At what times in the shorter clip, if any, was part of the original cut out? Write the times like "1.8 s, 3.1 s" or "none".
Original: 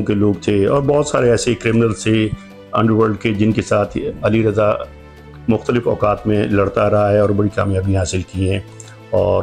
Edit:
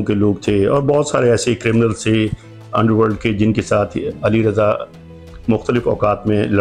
none